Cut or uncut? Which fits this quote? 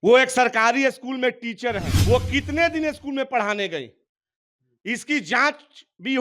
cut